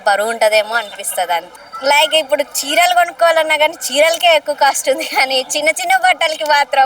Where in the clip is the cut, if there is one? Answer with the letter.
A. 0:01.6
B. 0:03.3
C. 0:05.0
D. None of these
A